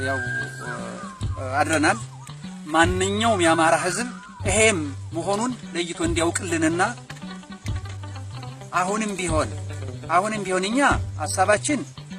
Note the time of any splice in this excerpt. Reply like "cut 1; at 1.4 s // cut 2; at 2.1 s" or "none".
none